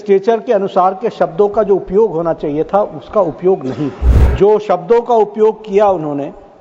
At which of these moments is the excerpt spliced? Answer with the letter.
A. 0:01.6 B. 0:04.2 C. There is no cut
B